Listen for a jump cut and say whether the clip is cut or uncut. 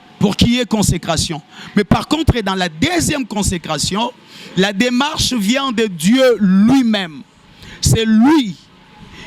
uncut